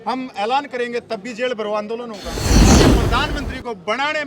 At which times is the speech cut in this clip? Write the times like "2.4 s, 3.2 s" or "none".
2.4 s, 3.1 s